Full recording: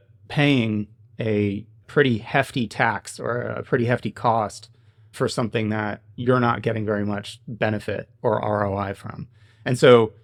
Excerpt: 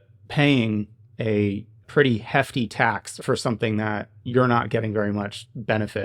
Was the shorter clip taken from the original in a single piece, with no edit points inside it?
no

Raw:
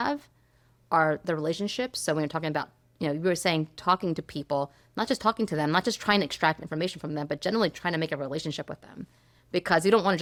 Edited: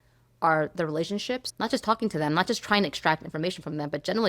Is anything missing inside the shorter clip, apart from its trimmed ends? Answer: yes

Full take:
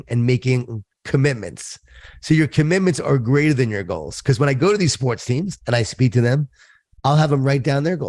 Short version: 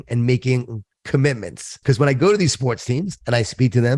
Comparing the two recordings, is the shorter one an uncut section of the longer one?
no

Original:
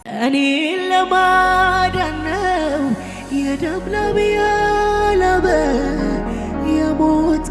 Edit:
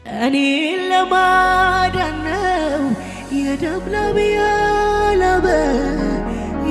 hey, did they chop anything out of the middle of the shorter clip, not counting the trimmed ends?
no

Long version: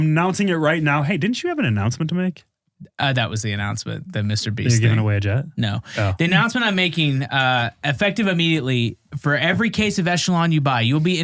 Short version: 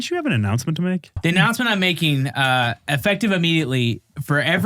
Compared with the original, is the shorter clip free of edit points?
no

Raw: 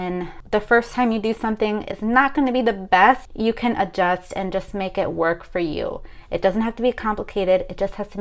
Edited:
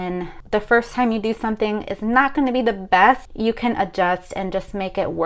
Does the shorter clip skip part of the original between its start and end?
no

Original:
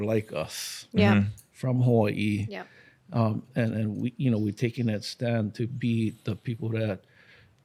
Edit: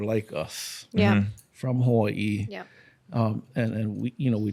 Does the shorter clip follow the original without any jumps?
yes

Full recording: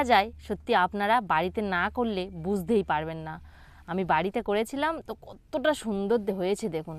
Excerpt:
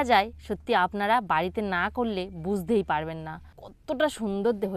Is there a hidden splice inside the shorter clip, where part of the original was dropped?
yes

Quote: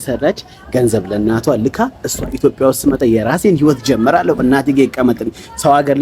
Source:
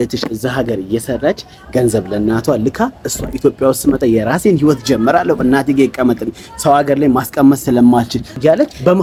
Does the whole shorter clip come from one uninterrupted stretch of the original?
yes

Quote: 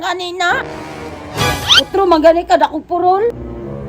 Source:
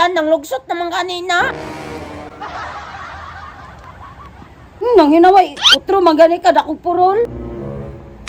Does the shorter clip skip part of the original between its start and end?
yes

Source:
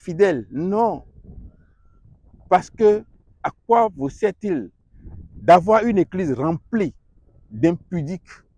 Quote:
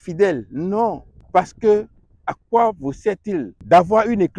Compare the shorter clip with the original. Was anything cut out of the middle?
yes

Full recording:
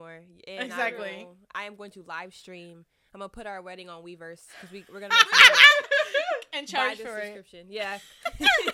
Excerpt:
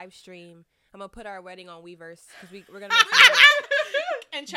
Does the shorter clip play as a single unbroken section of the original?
yes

